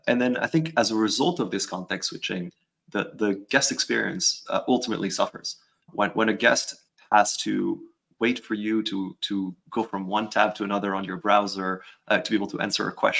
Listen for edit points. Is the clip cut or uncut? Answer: cut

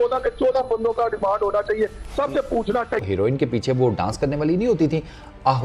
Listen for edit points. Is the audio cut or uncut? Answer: cut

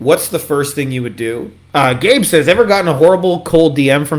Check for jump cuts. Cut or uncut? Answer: cut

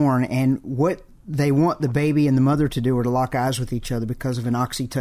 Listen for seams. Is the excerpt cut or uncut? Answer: uncut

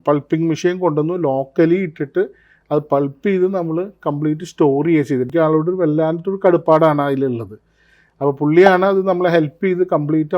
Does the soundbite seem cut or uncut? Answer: cut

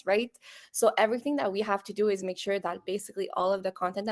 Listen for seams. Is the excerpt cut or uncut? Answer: uncut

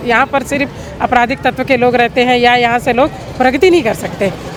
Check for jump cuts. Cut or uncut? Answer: uncut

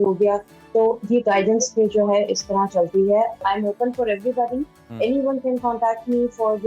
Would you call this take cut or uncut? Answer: cut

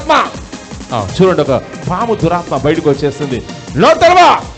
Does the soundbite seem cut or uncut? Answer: uncut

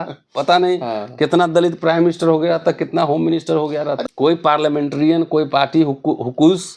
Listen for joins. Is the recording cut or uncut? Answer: cut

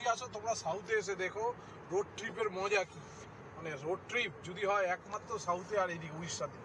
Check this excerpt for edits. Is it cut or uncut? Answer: uncut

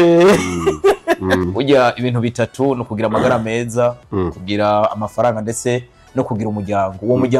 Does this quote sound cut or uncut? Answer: cut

